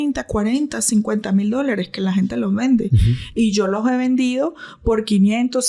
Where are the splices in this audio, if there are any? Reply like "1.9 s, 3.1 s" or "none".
none